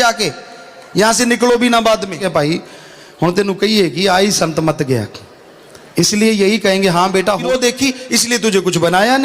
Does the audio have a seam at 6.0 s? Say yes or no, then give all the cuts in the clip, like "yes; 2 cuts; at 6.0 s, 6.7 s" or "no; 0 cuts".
no; 2 cuts; at 2.2 s, 7.5 s